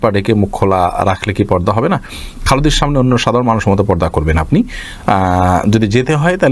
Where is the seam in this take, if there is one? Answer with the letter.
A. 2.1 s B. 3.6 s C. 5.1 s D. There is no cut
D